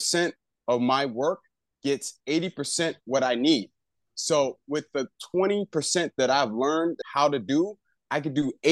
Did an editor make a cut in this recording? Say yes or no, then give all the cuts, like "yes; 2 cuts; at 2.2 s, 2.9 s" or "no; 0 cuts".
yes; 1 cut; at 7.0 s